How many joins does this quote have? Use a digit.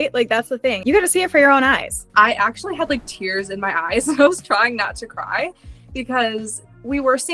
2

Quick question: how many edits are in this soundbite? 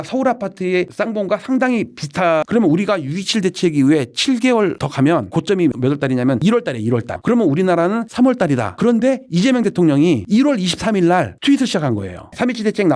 0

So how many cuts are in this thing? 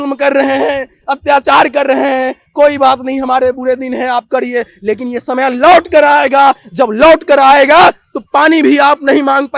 0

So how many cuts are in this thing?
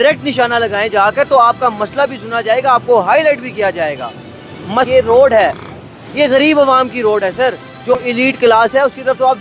2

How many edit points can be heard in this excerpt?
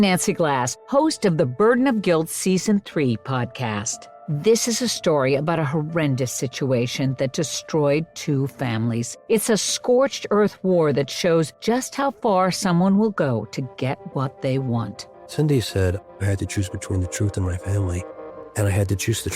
1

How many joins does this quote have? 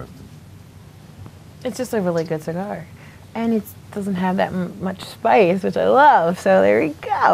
1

